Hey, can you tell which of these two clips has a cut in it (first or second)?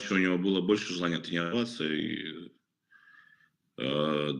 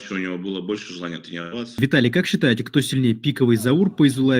second